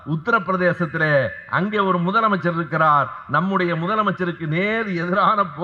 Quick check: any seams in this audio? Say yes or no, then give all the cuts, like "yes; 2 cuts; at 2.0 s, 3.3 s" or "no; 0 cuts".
no; 0 cuts